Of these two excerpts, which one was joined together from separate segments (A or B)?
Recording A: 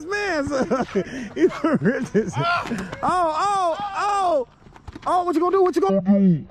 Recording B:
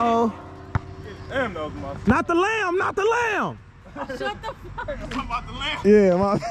B